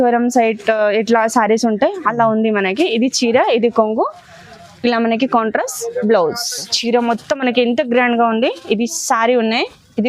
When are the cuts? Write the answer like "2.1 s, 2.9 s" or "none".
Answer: 6.7 s